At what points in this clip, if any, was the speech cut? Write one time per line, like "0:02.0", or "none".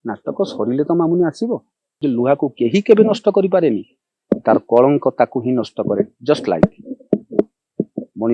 0:02.0